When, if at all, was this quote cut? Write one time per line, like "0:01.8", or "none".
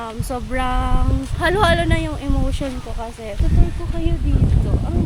0:03.4